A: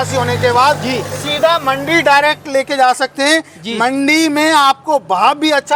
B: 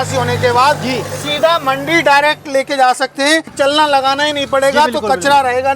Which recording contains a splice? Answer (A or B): B